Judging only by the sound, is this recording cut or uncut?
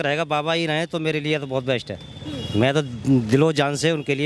uncut